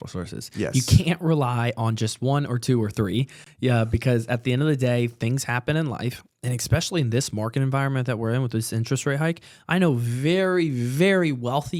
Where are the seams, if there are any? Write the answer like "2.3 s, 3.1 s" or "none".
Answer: none